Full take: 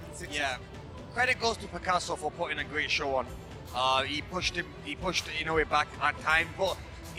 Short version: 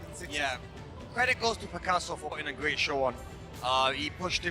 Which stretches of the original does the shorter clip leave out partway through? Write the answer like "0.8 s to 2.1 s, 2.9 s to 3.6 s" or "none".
2.4 s to 2.5 s